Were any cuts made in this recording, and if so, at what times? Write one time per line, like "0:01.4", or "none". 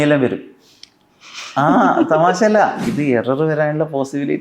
0:02.9